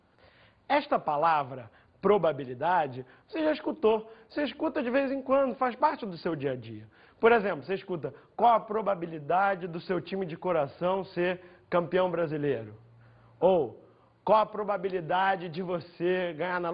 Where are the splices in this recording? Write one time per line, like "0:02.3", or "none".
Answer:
none